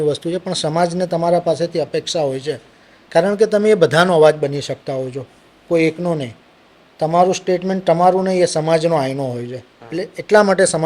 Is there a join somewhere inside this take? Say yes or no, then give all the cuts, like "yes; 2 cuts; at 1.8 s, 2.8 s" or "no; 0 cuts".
no; 0 cuts